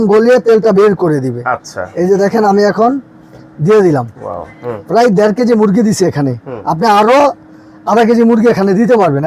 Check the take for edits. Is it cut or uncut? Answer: uncut